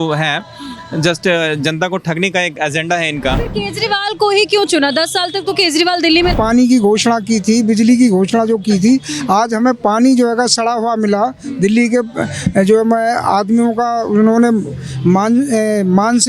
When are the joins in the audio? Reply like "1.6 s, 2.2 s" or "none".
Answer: 3.4 s, 6.3 s

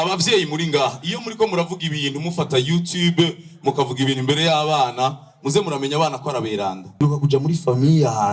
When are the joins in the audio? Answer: 7.0 s

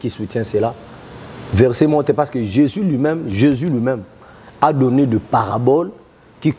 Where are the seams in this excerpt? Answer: none

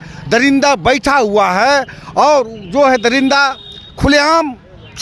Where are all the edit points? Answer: none

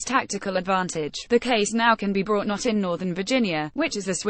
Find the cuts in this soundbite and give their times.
1.3 s

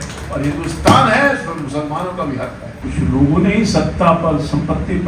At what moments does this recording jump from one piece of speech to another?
2.7 s

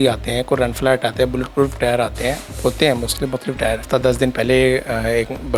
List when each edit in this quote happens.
3.8 s

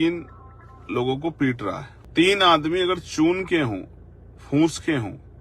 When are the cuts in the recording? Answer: 1.9 s

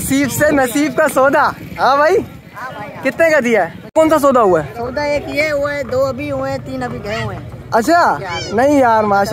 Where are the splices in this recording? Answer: 3.8 s

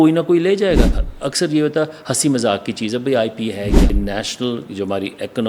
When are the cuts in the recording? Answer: 1.1 s, 3.9 s

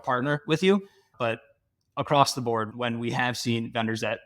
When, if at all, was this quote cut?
2.7 s

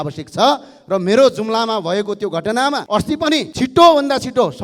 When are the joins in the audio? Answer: none

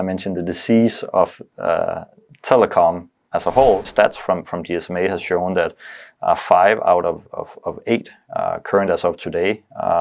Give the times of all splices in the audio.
3.9 s

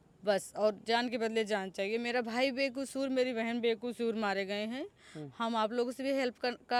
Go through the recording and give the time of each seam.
none

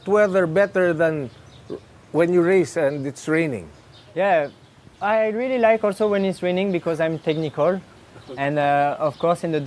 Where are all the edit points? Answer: none

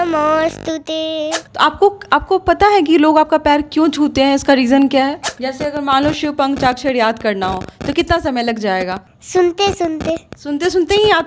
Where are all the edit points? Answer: 1.4 s, 5.3 s, 9.1 s

